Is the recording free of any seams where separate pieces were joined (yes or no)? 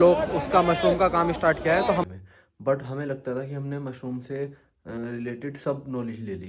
no